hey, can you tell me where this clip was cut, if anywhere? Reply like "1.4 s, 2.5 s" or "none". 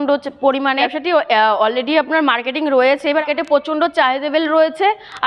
0.9 s, 3.2 s